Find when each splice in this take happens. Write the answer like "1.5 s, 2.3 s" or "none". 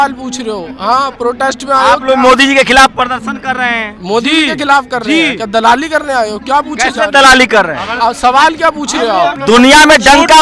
9.4 s